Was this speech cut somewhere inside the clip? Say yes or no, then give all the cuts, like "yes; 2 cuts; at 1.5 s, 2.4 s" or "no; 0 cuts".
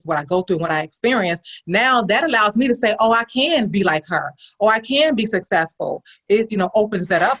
yes; 1 cut; at 6.5 s